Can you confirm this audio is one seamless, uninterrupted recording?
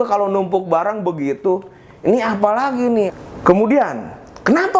no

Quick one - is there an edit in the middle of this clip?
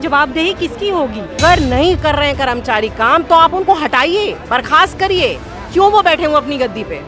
yes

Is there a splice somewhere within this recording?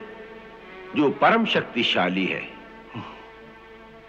no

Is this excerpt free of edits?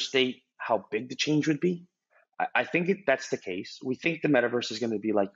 no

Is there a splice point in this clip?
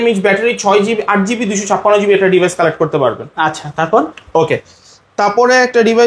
no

